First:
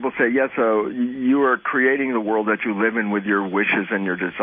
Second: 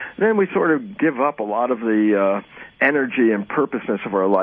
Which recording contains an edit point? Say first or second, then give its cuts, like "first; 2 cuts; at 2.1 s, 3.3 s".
second; 1 cut; at 2.7 s